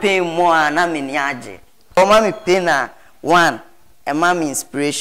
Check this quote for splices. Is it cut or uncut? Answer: cut